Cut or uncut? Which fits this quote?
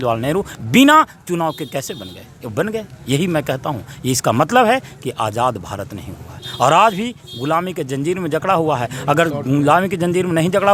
uncut